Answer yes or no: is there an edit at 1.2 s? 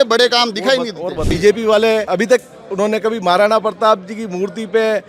yes